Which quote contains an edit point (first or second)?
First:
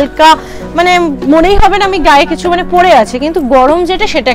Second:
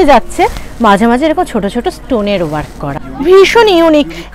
second